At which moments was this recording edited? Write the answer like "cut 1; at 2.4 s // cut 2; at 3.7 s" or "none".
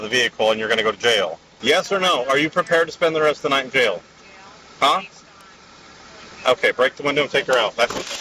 cut 1; at 1.5 s

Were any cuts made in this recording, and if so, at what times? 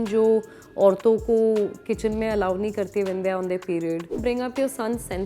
cut 1; at 4.2 s

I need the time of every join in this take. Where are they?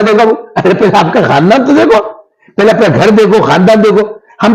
none

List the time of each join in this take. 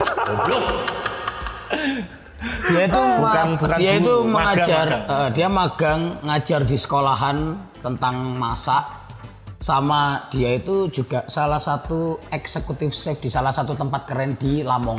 none

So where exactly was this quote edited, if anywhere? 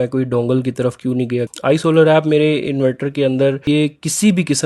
cut 1; at 1.5 s // cut 2; at 3.6 s

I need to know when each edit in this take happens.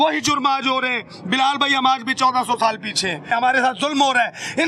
none

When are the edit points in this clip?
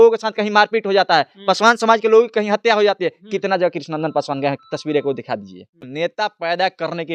cut 1; at 5.8 s

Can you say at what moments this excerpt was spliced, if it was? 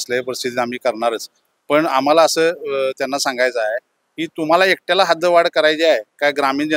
none

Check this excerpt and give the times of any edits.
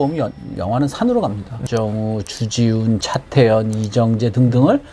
cut 1; at 1.6 s

